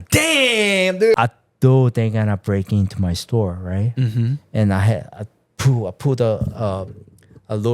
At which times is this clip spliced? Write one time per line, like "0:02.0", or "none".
0:01.2

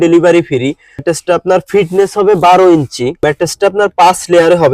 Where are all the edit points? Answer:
0:01.0
0:03.2

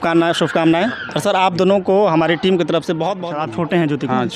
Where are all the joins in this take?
0:03.2

